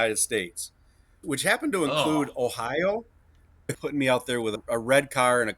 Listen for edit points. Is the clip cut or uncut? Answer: cut